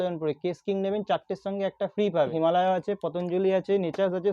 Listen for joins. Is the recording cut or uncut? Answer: cut